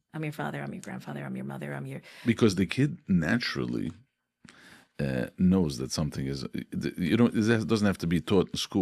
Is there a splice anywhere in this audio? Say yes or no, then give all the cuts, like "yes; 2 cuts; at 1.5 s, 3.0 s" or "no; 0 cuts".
no; 0 cuts